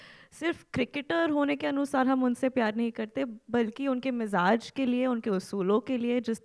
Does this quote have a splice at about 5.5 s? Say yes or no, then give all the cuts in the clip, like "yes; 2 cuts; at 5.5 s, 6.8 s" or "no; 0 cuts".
no; 0 cuts